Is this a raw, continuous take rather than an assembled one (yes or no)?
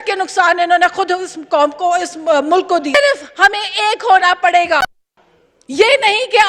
no